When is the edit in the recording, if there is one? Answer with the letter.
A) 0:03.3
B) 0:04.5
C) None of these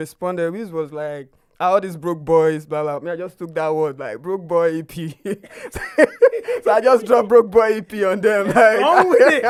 C